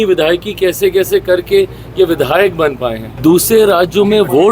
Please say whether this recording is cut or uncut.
cut